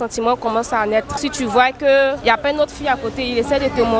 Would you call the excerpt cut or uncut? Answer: cut